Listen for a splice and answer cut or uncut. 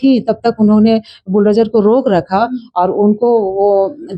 uncut